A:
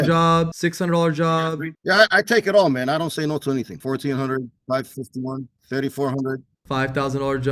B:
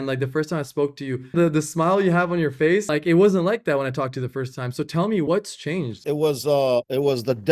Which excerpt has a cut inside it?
B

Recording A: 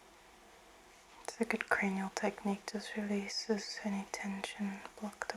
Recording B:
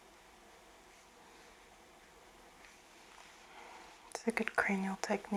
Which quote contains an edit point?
A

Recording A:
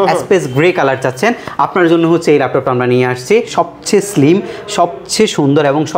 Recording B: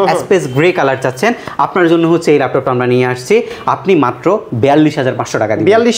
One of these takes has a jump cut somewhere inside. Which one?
A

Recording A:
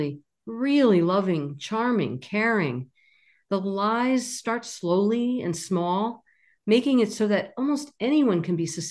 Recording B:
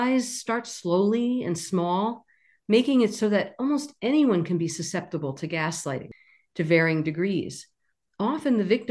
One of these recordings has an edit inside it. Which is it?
B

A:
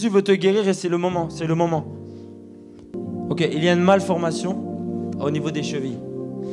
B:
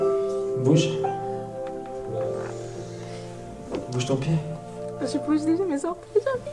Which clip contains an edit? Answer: A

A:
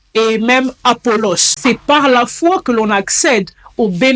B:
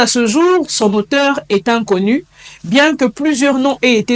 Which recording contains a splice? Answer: A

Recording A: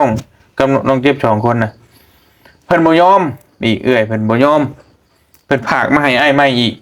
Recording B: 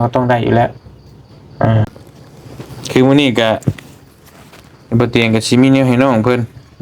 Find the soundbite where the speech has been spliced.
B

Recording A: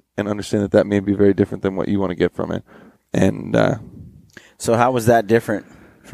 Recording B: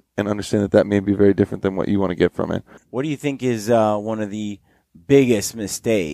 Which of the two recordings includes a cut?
B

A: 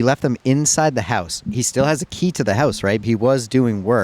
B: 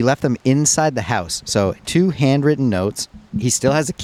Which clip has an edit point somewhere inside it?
A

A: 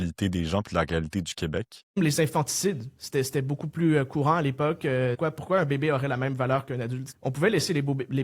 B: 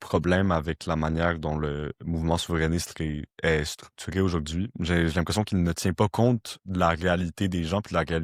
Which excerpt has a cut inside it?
A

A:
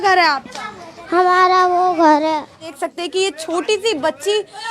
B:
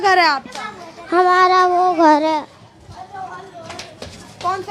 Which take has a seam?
A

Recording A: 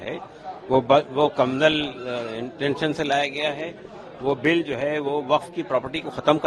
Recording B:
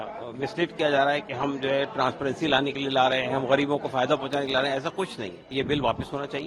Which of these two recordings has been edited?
B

